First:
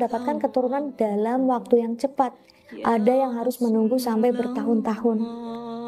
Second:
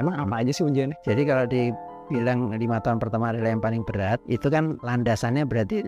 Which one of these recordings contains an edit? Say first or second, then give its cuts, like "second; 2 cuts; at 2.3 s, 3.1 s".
second; 1 cut; at 2.4 s